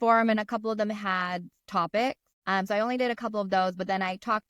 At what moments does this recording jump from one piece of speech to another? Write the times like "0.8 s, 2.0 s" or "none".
2.3 s